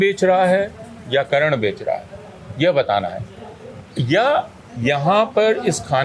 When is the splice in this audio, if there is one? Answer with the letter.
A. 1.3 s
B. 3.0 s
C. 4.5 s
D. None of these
A